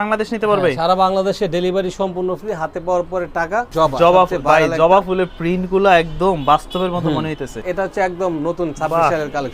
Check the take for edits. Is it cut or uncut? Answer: cut